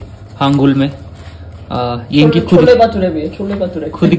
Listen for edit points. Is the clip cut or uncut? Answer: uncut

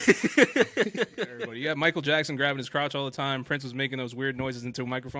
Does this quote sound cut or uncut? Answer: cut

